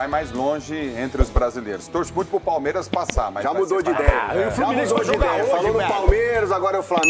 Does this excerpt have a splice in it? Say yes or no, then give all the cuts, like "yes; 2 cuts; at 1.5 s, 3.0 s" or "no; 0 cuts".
no; 0 cuts